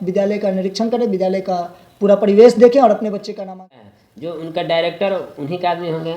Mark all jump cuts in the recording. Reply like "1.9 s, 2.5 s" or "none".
3.7 s